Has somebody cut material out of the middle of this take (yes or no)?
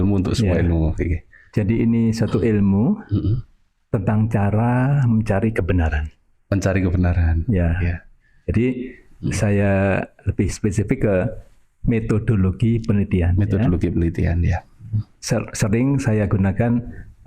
no